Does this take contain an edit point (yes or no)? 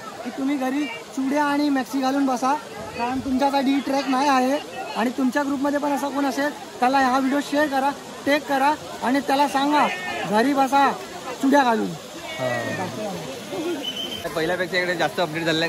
no